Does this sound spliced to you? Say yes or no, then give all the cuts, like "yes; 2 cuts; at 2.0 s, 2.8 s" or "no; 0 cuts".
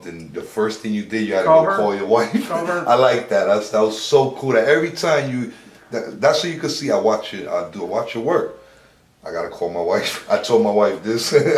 no; 0 cuts